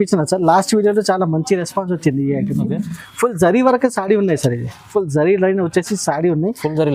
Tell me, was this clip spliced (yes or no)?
no